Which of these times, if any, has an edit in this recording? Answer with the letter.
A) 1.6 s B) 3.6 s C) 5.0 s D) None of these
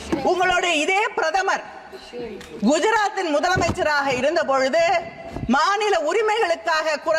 D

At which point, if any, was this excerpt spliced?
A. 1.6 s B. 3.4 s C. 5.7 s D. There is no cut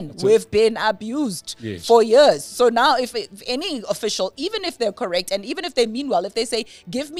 D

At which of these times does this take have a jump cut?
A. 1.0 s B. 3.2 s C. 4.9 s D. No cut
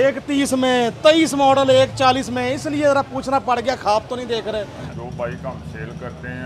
C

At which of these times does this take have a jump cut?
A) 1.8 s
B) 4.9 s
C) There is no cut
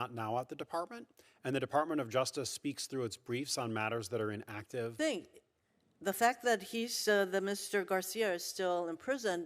B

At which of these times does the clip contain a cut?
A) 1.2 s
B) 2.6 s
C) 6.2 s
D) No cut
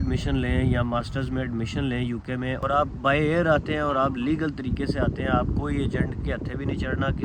B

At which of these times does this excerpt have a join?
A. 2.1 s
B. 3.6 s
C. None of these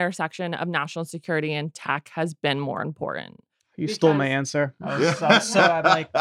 C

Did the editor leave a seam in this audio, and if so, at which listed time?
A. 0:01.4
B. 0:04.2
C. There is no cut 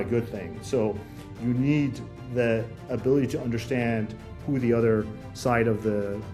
C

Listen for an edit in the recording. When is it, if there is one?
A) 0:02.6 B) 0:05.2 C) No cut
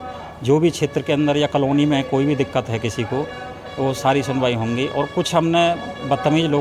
C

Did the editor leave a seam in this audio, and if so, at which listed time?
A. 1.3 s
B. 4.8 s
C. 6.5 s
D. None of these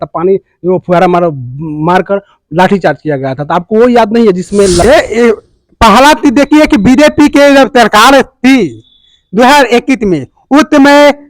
B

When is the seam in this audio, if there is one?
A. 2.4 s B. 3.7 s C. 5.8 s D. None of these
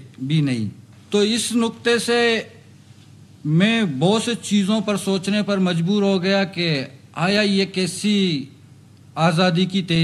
D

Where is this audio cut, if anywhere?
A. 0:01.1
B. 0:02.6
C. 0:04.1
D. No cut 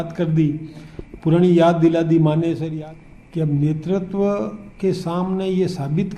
B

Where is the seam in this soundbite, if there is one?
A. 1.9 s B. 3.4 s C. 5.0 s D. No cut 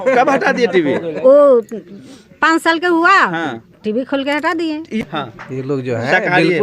C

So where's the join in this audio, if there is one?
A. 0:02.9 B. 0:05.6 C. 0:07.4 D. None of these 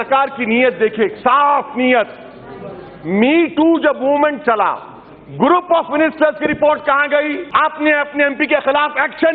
C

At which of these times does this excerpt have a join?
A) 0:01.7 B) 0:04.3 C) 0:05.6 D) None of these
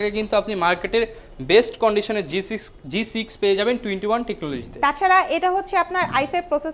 D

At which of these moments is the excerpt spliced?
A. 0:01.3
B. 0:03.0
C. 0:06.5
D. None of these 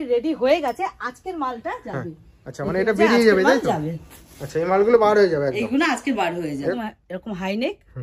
C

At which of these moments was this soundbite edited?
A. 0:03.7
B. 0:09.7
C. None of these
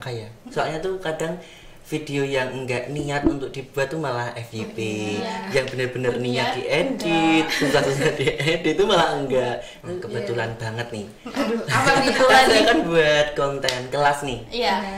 B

